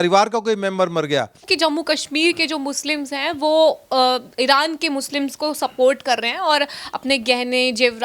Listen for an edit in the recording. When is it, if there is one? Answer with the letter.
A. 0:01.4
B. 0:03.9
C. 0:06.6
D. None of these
A